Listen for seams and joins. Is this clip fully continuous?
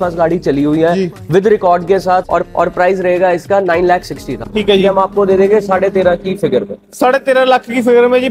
no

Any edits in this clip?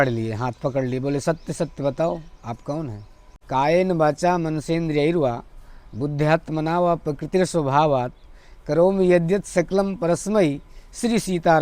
yes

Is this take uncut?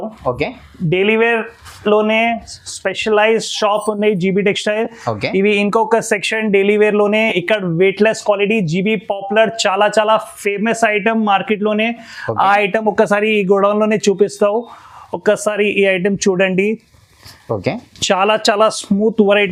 yes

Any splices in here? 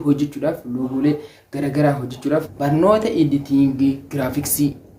yes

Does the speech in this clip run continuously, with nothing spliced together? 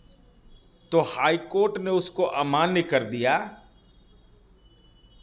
yes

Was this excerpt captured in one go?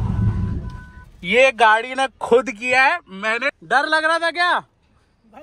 no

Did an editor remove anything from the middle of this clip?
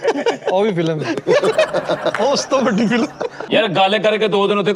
yes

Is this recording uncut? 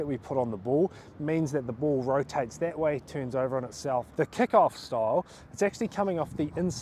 no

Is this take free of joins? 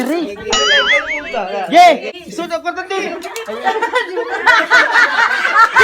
no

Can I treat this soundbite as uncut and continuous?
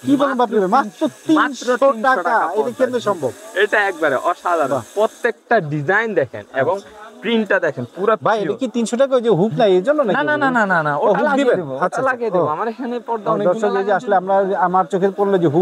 yes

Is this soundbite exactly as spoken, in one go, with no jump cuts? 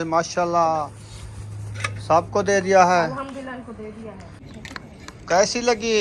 no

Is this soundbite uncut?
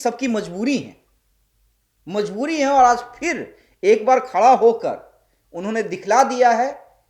yes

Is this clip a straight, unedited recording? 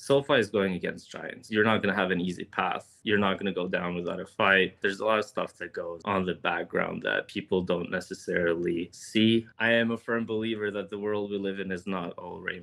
yes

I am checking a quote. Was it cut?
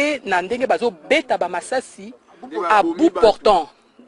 no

